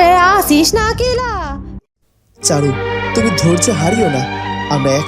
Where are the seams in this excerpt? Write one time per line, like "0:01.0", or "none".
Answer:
0:01.8